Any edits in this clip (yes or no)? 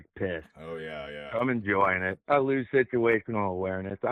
no